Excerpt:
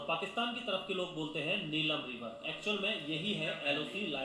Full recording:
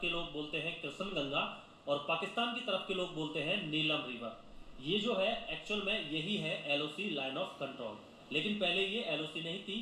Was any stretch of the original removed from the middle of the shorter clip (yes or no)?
yes